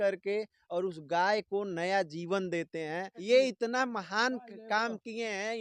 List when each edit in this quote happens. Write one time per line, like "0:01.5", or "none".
0:03.1

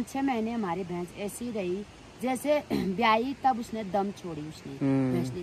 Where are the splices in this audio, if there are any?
none

